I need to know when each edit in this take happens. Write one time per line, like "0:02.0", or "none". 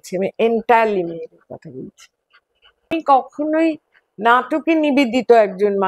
0:02.9